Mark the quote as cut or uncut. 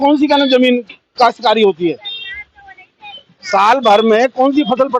uncut